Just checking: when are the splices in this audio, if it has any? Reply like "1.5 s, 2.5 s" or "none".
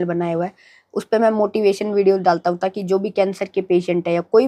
none